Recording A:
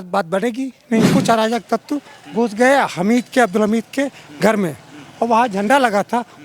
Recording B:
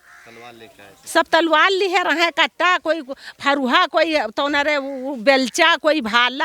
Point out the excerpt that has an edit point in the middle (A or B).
A